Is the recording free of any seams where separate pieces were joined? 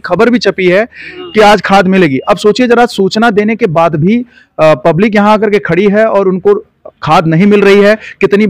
yes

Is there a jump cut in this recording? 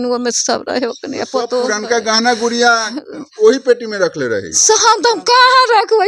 yes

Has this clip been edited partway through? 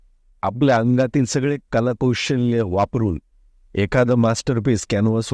no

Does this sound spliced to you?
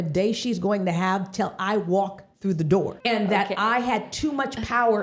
yes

